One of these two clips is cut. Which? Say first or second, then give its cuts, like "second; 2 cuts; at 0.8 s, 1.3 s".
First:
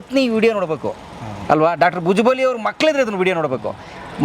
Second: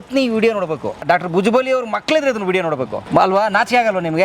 second; 2 cuts; at 1.0 s, 3.0 s